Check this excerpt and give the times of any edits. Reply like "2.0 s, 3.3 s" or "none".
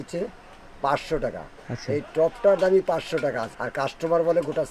3.6 s